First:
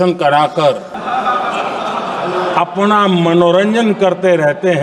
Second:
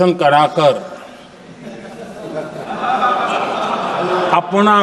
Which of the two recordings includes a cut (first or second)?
first